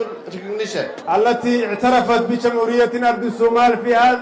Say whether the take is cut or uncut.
cut